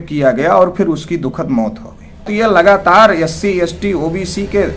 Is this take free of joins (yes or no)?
no